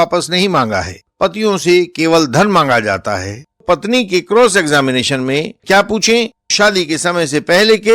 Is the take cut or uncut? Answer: cut